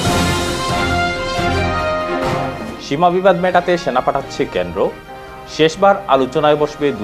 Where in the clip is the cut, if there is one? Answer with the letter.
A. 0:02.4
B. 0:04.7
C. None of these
A